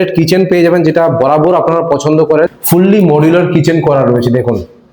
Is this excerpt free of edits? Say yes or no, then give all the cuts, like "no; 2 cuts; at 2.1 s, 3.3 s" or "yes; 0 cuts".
no; 1 cut; at 2.5 s